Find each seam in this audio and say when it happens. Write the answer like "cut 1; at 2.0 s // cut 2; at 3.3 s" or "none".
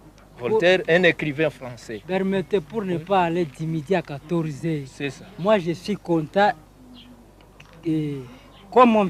cut 1; at 7.6 s